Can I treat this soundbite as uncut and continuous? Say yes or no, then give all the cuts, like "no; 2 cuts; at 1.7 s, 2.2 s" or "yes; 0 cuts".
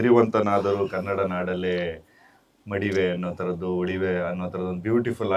yes; 0 cuts